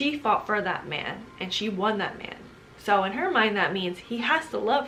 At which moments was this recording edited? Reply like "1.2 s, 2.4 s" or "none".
none